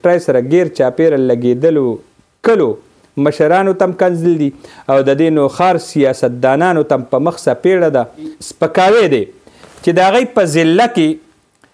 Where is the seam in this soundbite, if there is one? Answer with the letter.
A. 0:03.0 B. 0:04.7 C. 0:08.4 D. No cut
C